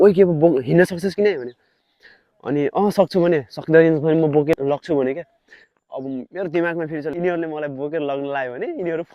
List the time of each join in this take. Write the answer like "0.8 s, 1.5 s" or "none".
4.5 s, 7.2 s